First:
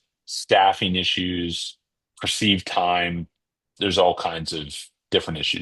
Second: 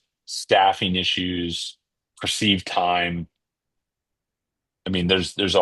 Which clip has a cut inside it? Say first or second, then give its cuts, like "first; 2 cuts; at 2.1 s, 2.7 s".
first; 1 cut; at 3.7 s